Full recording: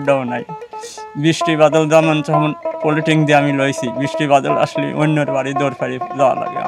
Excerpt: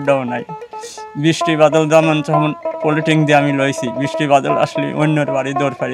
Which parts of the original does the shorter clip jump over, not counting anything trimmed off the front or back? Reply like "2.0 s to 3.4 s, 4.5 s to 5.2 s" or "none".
none